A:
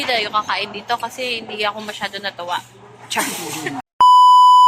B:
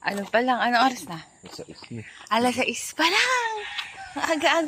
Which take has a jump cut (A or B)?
A